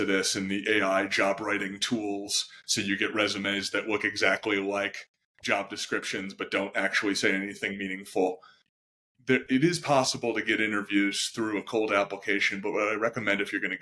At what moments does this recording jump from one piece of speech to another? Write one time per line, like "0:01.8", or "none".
0:08.6